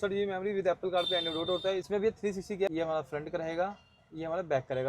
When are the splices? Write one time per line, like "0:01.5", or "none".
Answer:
0:01.9
0:02.7